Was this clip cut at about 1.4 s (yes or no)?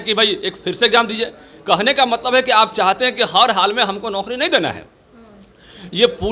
no